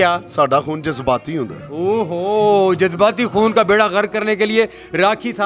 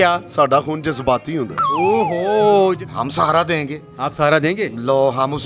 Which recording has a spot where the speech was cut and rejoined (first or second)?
second